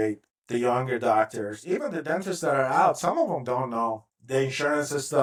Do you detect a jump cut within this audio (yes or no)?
no